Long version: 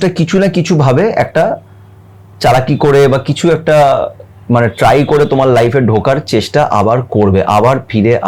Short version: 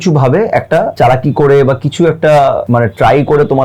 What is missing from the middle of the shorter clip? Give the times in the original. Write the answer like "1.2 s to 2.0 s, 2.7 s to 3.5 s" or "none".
1.6 s to 2.4 s, 4.1 s to 4.4 s